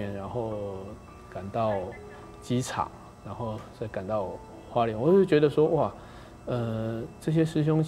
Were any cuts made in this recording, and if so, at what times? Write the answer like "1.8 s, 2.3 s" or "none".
none